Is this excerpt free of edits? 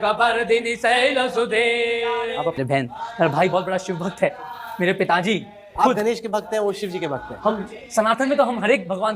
no; 1 cut; at 2.6 s

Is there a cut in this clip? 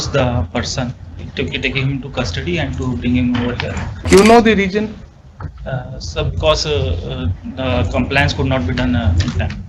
yes; 1 cut; at 4.0 s

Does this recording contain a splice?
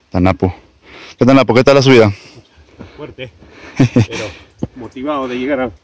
no; 0 cuts

